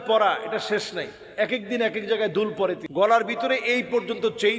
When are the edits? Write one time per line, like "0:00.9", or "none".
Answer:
0:02.8